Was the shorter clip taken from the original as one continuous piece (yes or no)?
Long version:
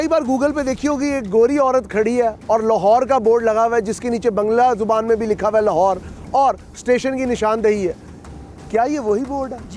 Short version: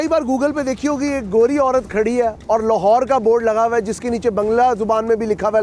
yes